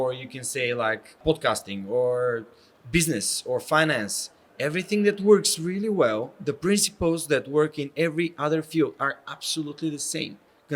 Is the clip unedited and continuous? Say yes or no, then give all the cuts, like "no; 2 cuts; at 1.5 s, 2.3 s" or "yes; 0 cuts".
no; 1 cut; at 1.2 s